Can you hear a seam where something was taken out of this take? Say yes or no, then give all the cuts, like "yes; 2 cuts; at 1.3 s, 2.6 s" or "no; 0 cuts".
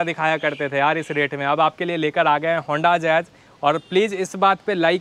no; 0 cuts